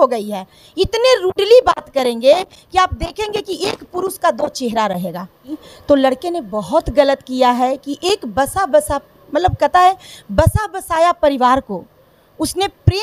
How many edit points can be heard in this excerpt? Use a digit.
1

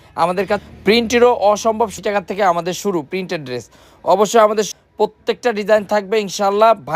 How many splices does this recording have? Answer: 2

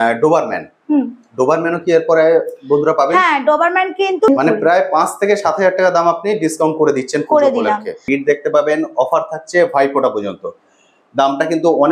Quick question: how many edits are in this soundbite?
2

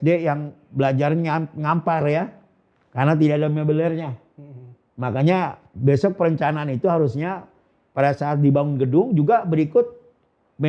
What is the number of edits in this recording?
0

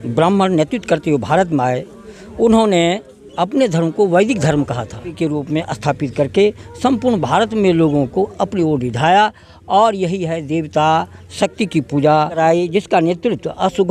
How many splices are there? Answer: 2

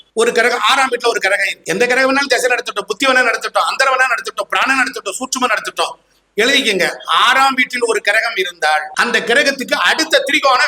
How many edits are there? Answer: 2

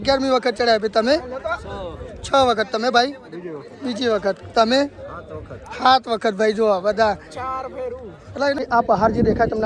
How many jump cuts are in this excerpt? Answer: 1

